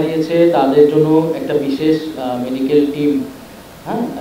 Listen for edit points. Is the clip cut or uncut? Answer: uncut